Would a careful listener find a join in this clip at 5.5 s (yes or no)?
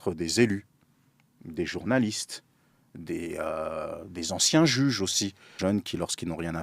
yes